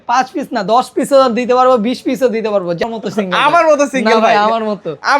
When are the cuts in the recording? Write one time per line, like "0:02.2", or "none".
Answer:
0:02.8